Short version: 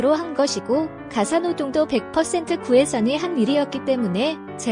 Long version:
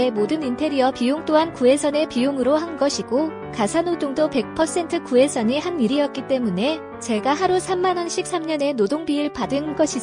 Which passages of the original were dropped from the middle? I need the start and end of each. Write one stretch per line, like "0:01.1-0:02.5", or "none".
none